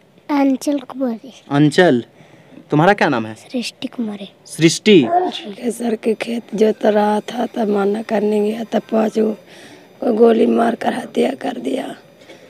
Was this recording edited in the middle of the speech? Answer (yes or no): yes